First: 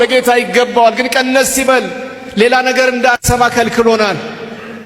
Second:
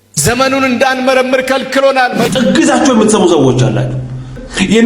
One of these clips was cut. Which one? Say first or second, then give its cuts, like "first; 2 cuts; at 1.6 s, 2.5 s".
second; 1 cut; at 2.3 s